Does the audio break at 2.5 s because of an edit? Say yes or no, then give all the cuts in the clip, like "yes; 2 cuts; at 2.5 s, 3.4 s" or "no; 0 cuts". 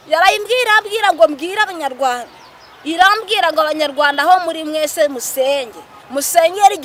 no; 0 cuts